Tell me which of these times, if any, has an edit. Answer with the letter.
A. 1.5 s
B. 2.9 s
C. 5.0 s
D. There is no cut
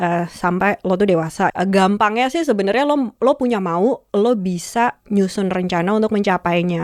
A